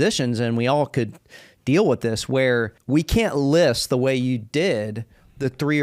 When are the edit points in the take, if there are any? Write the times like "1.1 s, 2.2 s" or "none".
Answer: 2.8 s